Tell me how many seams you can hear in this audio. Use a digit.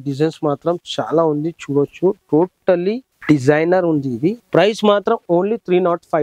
2